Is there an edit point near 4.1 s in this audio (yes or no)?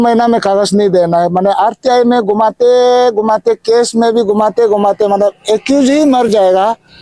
no